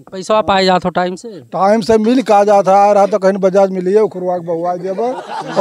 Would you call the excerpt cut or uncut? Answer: uncut